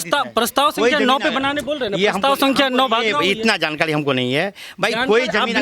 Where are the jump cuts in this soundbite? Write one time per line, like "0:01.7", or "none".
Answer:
none